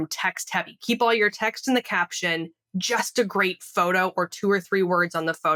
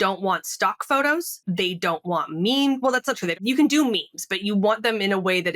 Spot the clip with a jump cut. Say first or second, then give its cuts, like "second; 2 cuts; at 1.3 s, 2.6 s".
second; 2 cuts; at 1.3 s, 3.4 s